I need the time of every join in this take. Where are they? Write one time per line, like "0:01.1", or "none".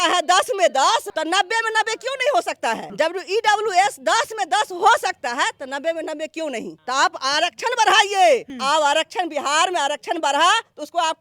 0:01.1
0:02.9
0:06.7
0:08.5